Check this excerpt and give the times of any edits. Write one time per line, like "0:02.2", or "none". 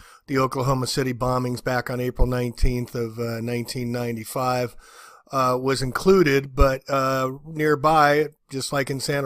0:03.5

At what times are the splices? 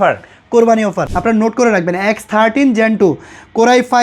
0:01.1

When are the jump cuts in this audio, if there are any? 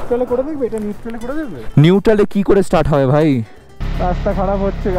0:03.9

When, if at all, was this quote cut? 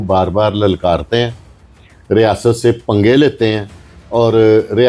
none

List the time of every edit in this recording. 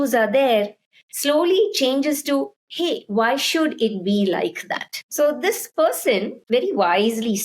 0:05.0
0:06.4

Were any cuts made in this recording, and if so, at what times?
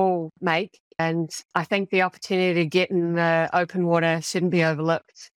0:01.0

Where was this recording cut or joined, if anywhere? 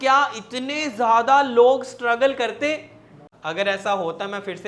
0:03.3

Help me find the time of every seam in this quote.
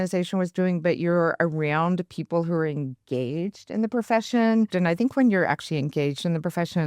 0:04.7

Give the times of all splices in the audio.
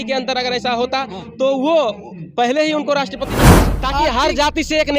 0:03.4

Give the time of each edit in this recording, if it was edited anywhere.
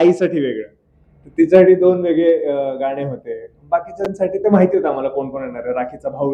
none

